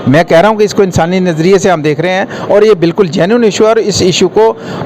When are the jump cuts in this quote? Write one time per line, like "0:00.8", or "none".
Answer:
none